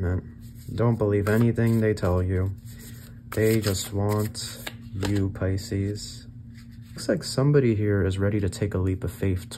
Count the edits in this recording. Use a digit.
1